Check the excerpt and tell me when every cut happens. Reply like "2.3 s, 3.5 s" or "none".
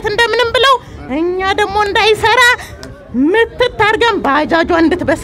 none